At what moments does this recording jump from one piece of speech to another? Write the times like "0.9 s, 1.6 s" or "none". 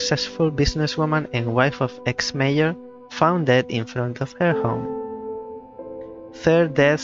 none